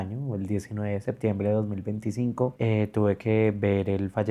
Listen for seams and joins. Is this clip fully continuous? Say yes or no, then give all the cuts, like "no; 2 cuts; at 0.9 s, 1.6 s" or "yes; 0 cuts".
yes; 0 cuts